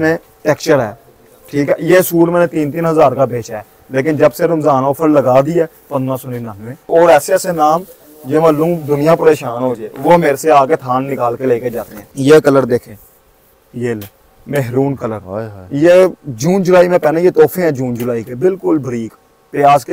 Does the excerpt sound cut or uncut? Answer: cut